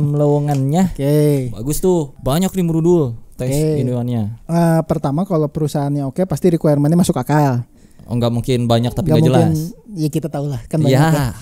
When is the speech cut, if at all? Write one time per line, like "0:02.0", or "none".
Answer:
0:02.2
0:04.4

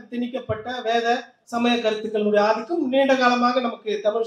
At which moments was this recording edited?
0:01.4

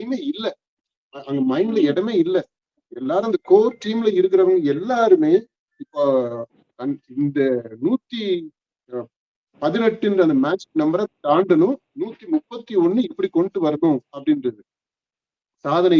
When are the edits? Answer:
none

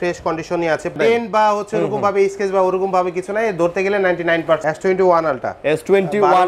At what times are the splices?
0:00.9
0:04.6

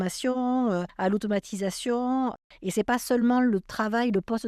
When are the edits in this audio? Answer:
none

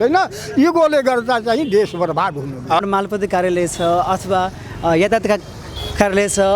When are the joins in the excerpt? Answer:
0:02.8

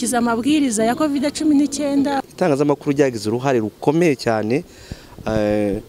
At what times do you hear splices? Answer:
0:02.3

